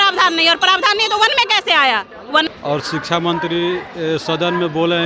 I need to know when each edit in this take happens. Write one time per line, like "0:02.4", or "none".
0:02.5